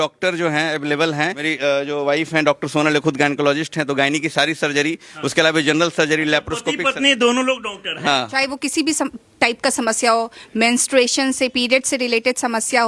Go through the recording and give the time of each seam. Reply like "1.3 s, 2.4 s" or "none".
1.4 s, 8.3 s